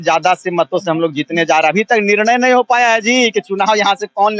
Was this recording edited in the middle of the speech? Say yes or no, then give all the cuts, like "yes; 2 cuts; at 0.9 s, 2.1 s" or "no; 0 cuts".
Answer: no; 0 cuts